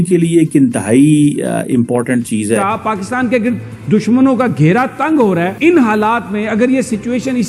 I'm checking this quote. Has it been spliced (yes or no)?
yes